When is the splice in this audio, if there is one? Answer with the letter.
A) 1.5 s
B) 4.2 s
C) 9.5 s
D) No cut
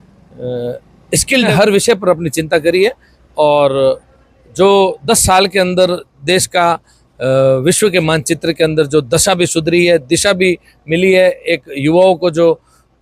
A